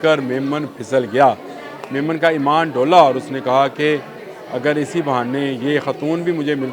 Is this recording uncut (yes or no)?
yes